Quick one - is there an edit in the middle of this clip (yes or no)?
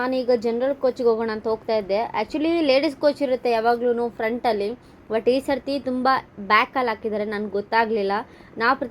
no